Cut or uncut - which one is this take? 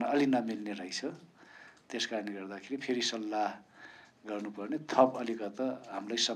uncut